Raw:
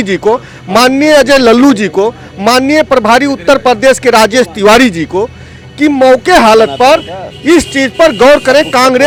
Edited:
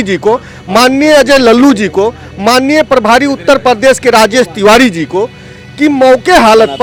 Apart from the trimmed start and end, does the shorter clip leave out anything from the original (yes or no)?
no